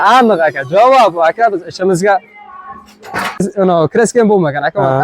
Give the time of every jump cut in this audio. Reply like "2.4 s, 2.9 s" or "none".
3.4 s